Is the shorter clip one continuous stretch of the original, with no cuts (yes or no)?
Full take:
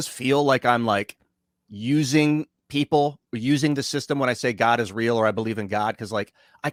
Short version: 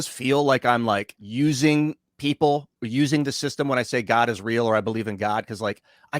no